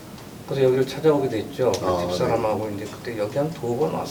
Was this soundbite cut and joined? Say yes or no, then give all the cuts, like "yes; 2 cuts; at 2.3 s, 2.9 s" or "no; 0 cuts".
no; 0 cuts